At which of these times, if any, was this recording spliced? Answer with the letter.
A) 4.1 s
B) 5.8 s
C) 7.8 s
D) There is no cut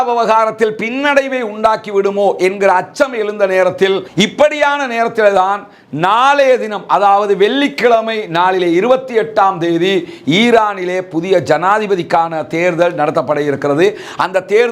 A